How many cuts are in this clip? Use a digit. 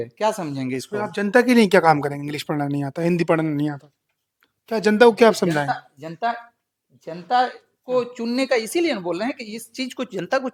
0